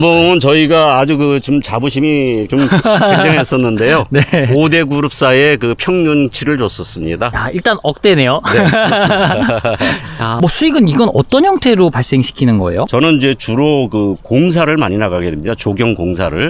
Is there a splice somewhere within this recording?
yes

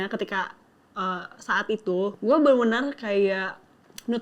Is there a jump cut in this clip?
yes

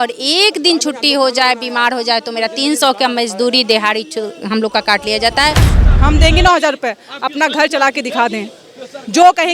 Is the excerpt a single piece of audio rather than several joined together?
no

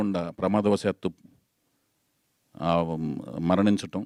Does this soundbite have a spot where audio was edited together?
no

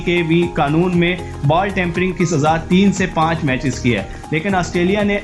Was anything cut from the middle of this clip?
no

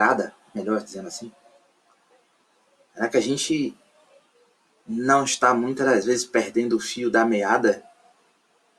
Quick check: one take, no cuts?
yes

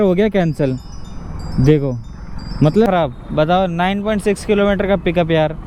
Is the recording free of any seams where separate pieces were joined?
no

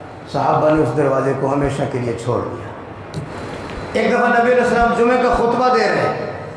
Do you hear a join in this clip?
yes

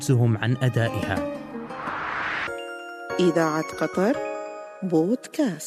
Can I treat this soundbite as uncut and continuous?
no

